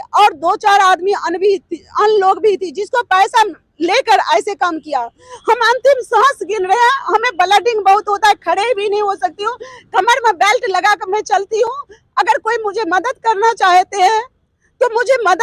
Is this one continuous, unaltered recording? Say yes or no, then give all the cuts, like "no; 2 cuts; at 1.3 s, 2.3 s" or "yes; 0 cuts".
yes; 0 cuts